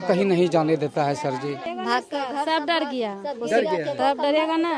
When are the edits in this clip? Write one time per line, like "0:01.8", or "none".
0:01.7